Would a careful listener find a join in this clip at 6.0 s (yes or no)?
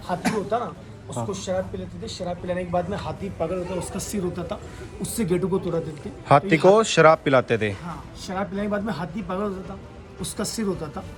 no